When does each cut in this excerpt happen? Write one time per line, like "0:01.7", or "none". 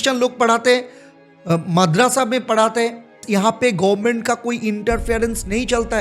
0:03.2